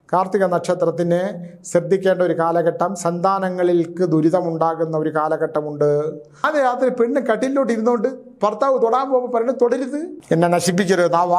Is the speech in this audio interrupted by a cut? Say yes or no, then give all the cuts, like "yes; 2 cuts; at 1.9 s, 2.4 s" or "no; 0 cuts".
yes; 2 cuts; at 6.4 s, 10.1 s